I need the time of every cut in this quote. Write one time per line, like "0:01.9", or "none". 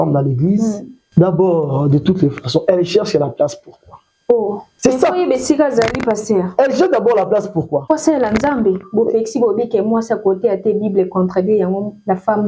0:00.9
0:04.7
0:07.8